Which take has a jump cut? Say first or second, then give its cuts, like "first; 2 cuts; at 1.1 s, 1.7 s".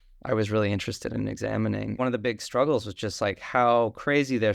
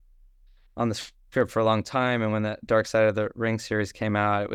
first; 1 cut; at 2.0 s